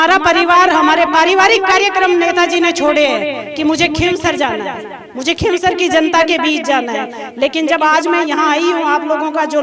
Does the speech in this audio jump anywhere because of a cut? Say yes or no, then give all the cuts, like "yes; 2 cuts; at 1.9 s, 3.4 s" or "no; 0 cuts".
no; 0 cuts